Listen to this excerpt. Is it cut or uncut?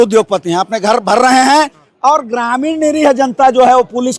uncut